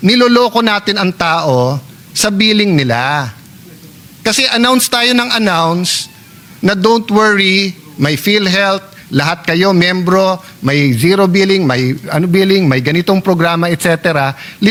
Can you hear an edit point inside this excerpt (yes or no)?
no